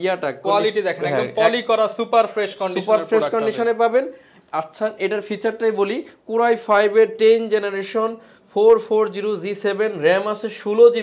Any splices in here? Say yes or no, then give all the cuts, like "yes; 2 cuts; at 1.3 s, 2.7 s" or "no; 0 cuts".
no; 0 cuts